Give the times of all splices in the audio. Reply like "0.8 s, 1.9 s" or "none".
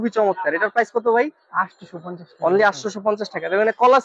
none